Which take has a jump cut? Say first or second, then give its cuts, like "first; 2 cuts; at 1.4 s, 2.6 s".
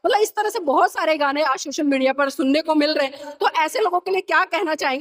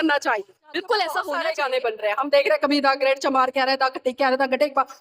second; 1 cut; at 1.3 s